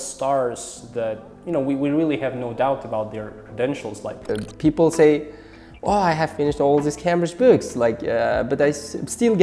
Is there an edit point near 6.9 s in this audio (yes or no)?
no